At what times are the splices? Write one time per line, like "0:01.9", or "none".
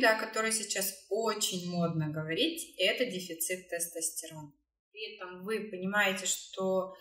0:05.1